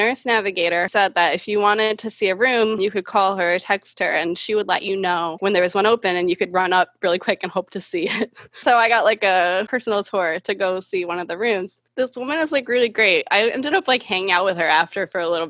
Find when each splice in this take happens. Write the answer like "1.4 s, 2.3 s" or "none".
0.9 s, 2.8 s, 5.4 s, 8.6 s, 11.8 s